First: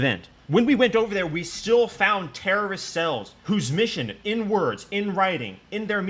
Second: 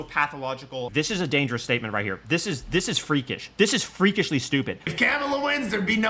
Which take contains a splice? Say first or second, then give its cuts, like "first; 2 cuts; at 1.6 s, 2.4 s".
second; 2 cuts; at 0.9 s, 4.9 s